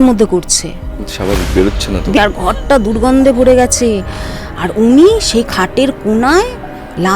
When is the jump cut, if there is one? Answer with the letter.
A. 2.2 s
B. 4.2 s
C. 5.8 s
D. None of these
A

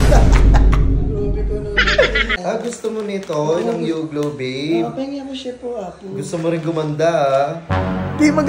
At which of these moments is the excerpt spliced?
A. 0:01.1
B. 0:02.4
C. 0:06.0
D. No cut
B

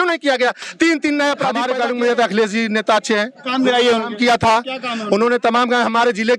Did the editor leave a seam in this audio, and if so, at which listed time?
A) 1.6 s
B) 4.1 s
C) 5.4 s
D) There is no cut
A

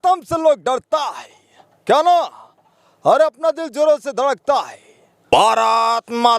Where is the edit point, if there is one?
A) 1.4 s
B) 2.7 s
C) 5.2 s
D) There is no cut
C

